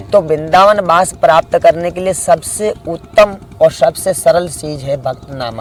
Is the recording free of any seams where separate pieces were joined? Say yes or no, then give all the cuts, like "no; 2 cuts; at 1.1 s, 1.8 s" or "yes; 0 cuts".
yes; 0 cuts